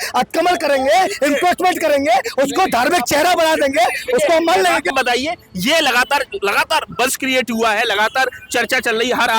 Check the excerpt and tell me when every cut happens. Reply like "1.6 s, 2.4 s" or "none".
4.9 s